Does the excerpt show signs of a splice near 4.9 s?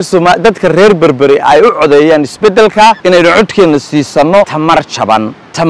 yes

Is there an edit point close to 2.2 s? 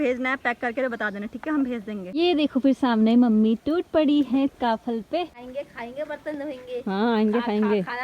yes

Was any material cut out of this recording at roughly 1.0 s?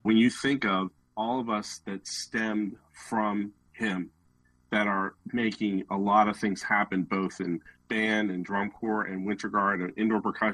yes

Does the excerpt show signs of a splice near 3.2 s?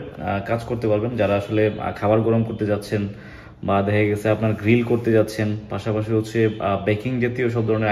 no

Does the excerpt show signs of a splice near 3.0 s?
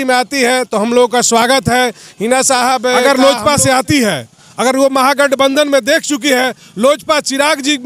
yes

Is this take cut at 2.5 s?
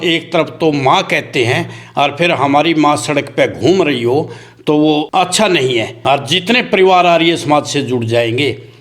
no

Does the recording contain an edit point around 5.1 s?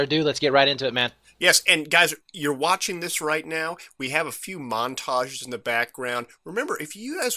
yes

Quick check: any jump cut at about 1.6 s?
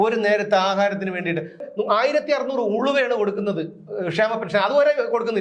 yes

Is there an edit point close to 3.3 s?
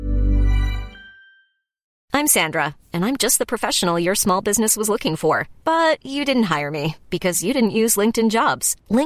no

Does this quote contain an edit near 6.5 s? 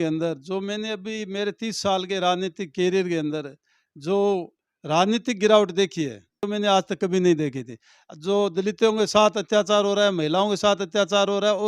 yes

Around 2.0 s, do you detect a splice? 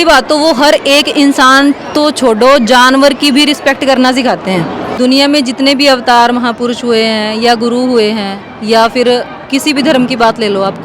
no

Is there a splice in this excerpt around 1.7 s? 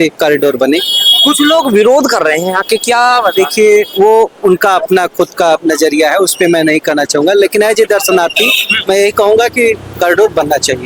no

